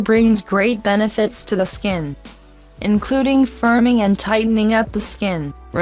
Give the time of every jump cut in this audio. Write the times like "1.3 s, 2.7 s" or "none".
none